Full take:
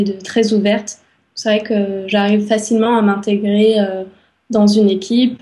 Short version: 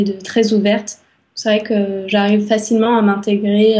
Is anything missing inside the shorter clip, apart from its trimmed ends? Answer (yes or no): no